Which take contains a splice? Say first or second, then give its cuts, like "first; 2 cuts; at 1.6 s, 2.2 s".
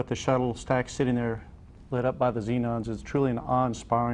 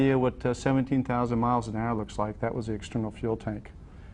second; 1 cut; at 2.7 s